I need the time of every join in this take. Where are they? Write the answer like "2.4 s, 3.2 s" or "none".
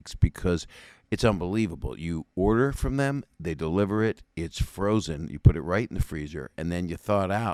none